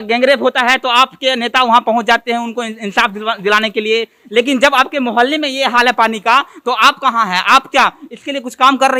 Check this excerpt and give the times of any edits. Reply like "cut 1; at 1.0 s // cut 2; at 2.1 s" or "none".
none